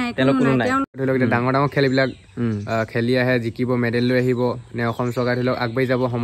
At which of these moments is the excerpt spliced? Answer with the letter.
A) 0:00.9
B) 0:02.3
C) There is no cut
A